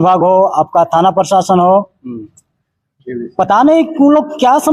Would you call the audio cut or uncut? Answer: uncut